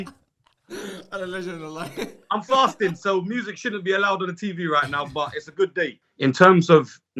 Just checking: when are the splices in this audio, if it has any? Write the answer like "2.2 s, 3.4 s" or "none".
5.9 s